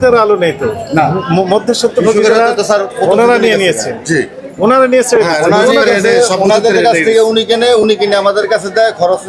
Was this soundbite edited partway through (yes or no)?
no